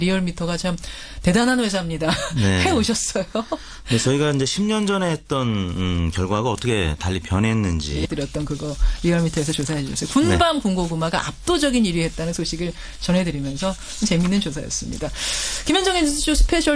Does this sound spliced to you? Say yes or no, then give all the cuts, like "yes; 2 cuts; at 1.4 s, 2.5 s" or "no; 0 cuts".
no; 0 cuts